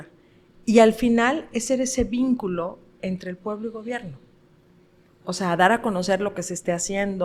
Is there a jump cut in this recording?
no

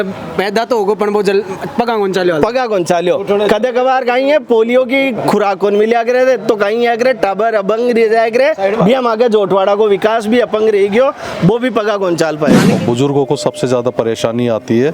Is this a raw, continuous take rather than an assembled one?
no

